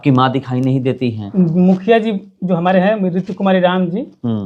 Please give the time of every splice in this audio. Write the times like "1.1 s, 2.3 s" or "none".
1.2 s